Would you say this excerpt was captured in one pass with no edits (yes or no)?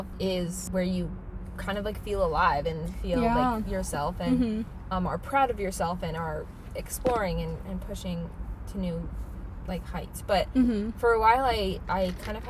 yes